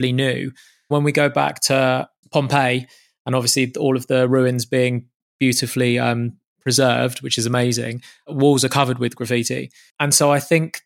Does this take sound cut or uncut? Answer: cut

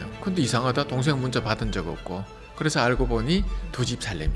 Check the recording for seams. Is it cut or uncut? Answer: uncut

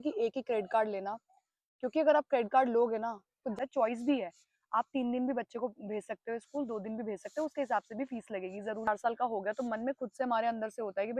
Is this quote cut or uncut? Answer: cut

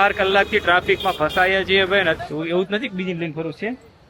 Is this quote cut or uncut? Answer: cut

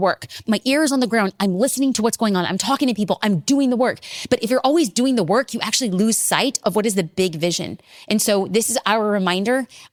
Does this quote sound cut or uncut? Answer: uncut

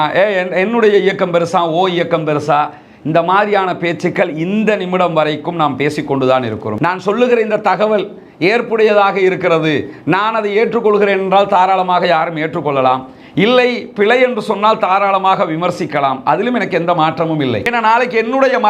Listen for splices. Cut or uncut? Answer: cut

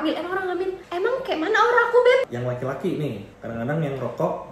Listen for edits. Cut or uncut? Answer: cut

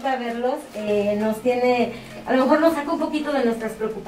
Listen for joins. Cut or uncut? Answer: uncut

